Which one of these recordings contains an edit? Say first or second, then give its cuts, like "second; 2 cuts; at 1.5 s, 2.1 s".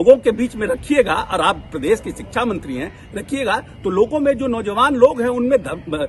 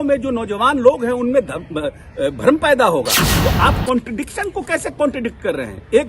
second; 1 cut; at 3.2 s